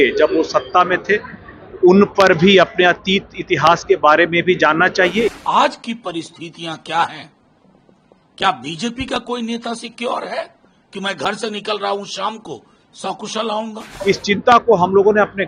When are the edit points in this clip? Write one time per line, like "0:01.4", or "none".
0:05.3
0:13.9